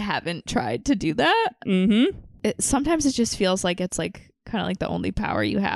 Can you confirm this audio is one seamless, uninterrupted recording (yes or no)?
no